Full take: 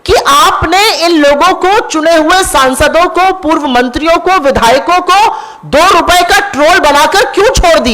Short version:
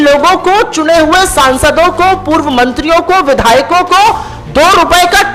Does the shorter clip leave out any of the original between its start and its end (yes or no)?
no